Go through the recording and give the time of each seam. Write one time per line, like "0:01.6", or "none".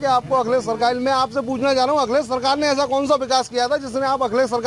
none